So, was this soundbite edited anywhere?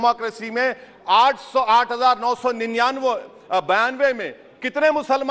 no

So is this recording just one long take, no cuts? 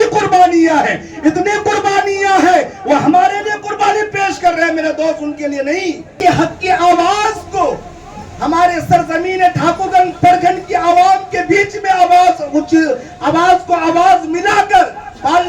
no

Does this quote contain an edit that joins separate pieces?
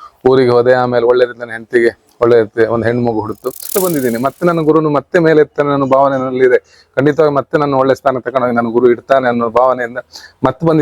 yes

